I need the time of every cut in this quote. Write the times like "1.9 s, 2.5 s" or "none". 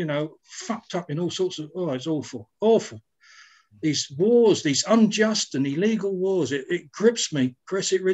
none